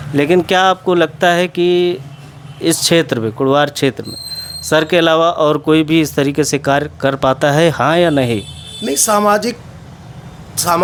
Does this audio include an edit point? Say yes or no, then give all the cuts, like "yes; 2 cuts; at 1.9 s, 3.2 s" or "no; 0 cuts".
no; 0 cuts